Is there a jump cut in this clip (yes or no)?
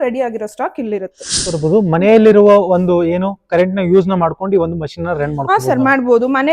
yes